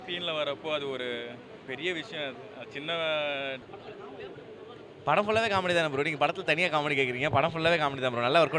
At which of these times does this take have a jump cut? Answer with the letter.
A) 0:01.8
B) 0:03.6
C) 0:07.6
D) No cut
B